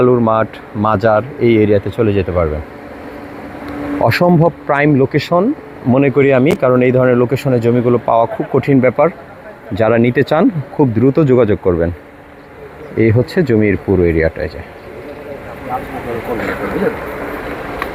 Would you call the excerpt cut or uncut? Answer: uncut